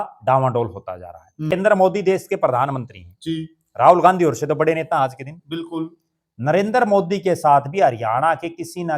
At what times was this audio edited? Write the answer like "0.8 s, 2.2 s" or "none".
1.5 s